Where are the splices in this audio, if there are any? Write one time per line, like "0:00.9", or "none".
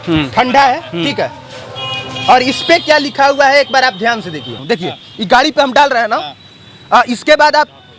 0:04.6